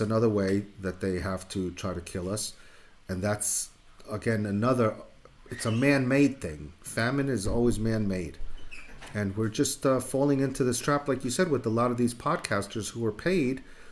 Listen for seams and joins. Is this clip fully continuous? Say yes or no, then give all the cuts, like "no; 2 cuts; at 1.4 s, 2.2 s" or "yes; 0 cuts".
yes; 0 cuts